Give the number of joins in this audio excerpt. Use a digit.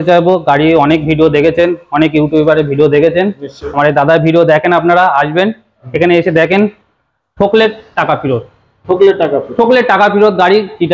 0